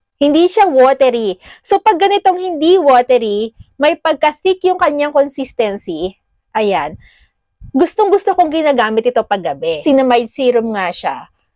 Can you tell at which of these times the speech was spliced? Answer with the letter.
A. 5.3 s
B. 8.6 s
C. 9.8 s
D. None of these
C